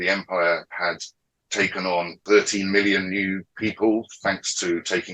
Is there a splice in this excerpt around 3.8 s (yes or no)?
no